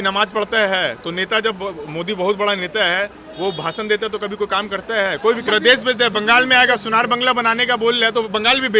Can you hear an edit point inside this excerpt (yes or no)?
yes